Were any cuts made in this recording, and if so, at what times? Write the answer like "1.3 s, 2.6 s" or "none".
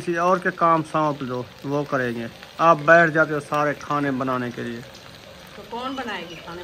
none